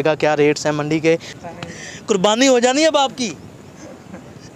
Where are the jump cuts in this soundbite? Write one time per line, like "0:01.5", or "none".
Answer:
0:01.3